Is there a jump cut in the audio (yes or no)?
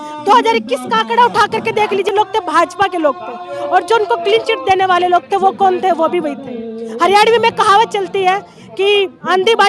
yes